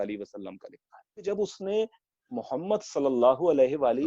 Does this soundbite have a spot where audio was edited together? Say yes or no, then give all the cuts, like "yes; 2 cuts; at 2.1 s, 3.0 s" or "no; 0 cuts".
yes; 1 cut; at 1.2 s